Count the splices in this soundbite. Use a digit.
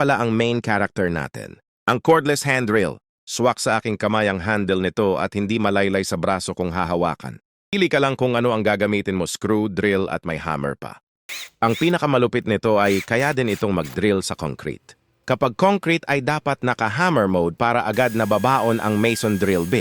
2